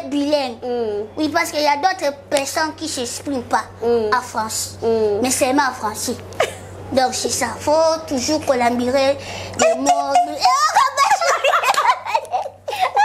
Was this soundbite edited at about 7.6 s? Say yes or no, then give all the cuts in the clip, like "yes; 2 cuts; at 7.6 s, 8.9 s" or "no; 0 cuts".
no; 0 cuts